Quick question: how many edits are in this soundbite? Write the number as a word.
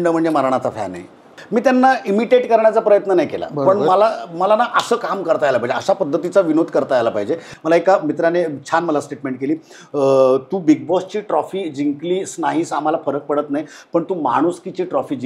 two